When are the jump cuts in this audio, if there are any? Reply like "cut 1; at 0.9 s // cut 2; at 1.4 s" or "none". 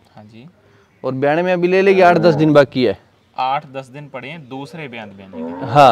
none